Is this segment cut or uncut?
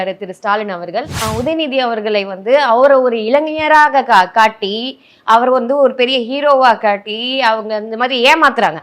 cut